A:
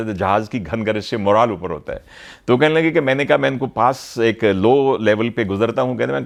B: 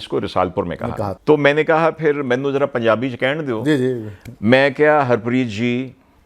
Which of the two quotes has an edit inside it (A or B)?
B